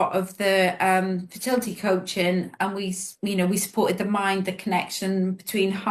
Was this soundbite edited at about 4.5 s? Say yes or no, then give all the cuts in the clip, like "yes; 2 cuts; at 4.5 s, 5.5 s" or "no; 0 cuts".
no; 0 cuts